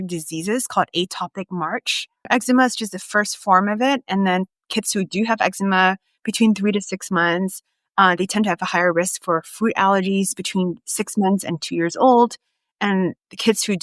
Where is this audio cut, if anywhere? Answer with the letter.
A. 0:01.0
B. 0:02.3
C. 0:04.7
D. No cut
B